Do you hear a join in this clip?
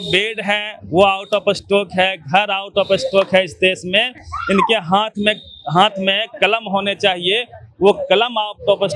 no; 0 cuts

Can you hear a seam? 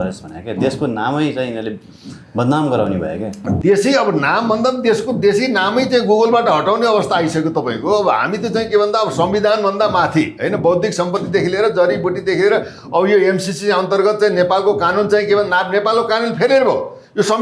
no; 0 cuts

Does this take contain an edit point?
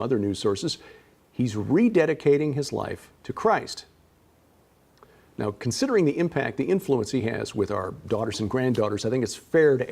yes; 1 cut; at 6.3 s

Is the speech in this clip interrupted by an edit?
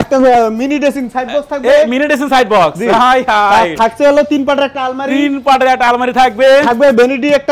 no; 0 cuts

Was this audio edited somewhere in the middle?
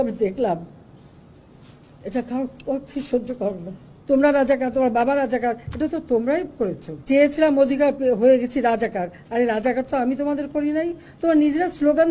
yes; 2 cuts; at 3.9 s, 6.9 s

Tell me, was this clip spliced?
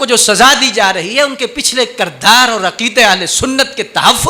no; 0 cuts

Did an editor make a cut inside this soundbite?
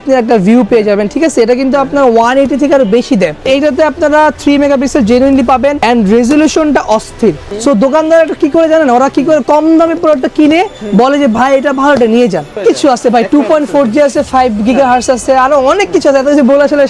yes; 4 cuts; at 3.4 s, 5.8 s, 7.5 s, 12.6 s

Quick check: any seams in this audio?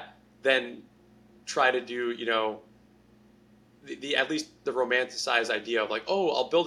no; 0 cuts

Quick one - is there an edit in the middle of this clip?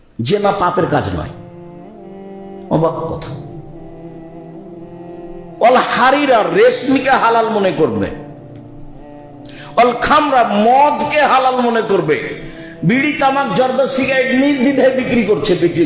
yes; 2 cuts; at 4.0 s, 5.6 s

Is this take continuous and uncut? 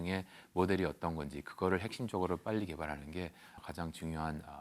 no; 1 cut; at 3.6 s

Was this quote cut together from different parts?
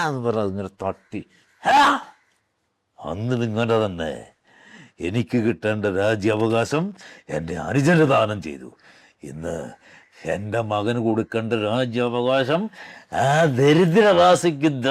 no; 0 cuts

